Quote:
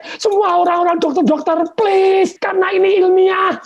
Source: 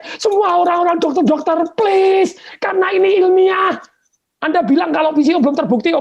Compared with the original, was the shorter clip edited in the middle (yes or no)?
yes